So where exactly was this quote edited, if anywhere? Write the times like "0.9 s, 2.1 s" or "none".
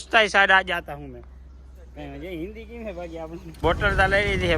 3.6 s

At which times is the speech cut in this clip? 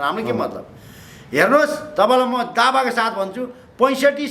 none

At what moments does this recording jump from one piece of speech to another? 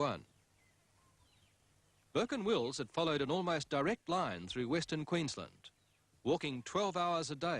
1.5 s

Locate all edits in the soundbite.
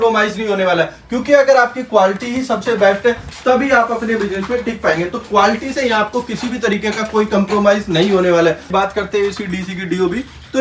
8.6 s

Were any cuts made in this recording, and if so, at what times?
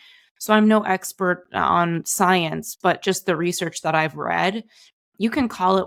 none

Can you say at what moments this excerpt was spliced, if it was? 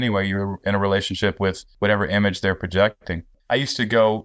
1.7 s, 3.3 s

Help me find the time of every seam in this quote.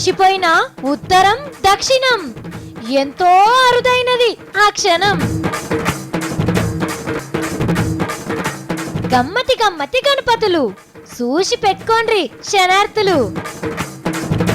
7.1 s

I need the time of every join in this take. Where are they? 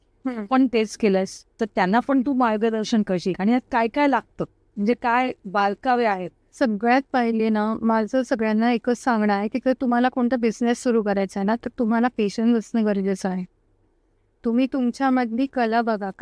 1.5 s, 6.4 s

